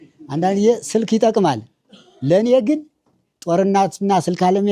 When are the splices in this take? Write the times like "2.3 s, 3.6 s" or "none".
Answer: none